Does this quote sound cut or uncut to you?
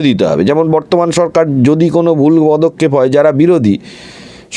uncut